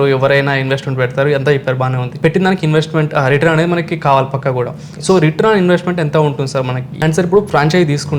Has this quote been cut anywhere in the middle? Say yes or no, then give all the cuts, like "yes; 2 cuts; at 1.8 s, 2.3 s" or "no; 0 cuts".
yes; 2 cuts; at 2.1 s, 6.9 s